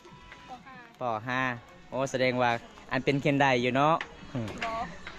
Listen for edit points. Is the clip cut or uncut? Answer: uncut